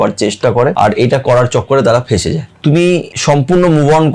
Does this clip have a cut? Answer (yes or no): yes